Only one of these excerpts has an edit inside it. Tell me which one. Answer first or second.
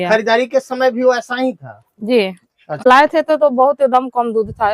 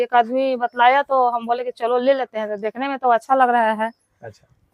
first